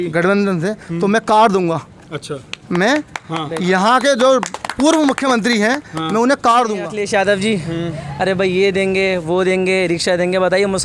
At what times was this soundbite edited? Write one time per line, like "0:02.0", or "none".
0:06.9